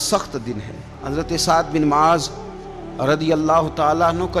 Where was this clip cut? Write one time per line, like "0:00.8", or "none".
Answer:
0:01.0